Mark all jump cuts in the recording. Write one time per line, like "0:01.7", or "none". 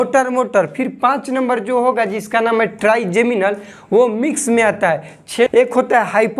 0:05.5